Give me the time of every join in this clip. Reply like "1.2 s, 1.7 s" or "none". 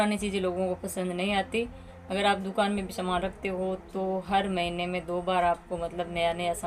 none